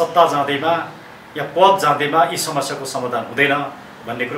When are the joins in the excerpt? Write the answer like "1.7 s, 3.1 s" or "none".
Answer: none